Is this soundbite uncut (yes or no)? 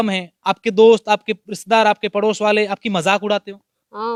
yes